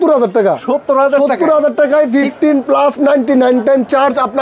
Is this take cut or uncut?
uncut